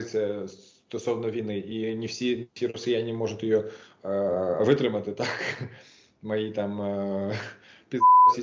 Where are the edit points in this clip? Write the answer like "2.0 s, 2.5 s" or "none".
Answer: none